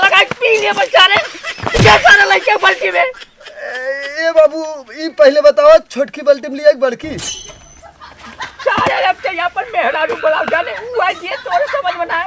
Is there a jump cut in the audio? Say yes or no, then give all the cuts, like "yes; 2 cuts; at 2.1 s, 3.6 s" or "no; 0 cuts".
no; 0 cuts